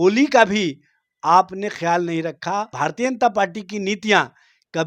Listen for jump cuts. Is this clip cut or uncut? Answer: cut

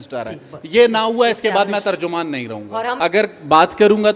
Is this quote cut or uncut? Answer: cut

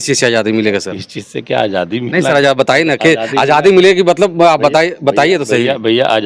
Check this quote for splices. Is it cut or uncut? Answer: uncut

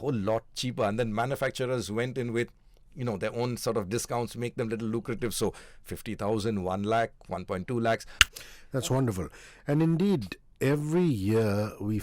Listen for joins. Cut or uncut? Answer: cut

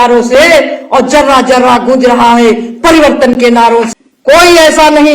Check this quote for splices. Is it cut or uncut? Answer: cut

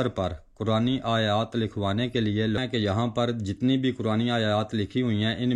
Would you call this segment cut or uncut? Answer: cut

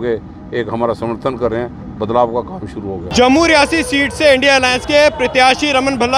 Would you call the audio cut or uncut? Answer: uncut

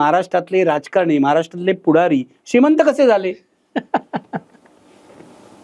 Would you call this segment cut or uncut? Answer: uncut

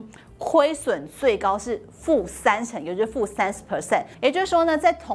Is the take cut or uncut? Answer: cut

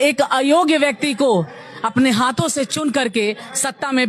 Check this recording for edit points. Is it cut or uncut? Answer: uncut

